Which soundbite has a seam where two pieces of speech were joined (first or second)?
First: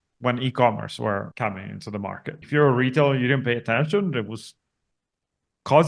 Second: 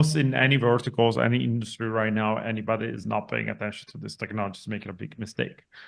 first